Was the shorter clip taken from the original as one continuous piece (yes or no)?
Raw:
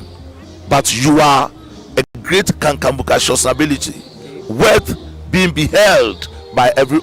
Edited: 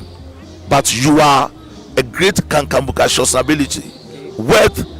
no